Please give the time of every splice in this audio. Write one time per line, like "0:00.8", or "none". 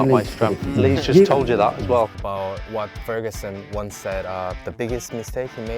0:02.1